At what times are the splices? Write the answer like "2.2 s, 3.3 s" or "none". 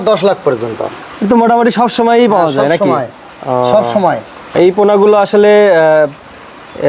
none